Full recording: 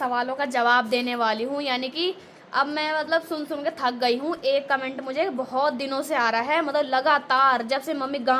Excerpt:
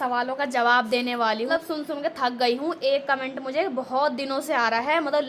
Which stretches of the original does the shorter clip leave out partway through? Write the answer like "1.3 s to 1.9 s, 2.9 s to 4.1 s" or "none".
1.5 s to 3.1 s